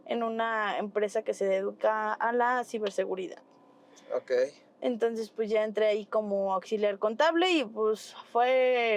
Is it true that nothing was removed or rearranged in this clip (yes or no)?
yes